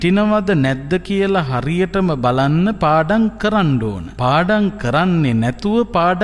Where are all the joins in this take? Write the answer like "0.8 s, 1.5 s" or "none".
4.0 s